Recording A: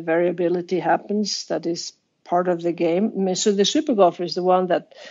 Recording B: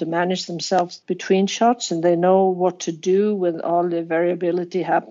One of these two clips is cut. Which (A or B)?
B